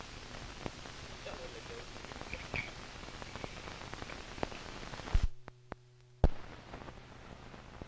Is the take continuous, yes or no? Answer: yes